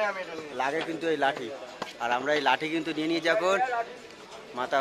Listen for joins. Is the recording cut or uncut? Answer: uncut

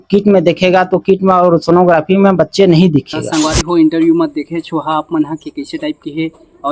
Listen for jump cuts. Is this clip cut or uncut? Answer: cut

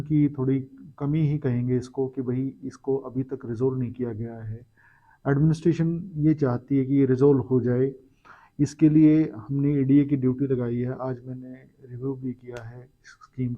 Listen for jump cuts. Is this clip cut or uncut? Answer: uncut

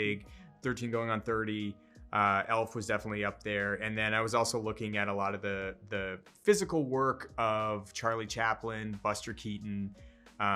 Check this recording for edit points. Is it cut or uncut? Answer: uncut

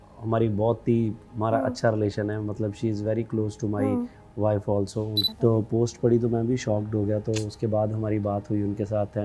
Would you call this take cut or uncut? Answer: cut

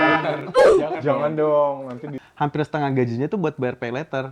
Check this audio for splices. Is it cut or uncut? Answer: cut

